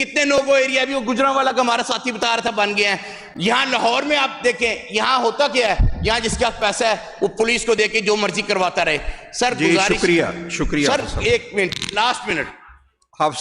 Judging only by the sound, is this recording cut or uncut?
uncut